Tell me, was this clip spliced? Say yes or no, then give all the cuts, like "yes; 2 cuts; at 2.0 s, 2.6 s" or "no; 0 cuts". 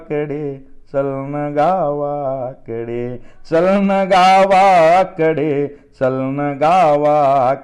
no; 0 cuts